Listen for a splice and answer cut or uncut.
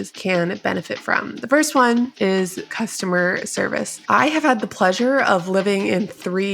cut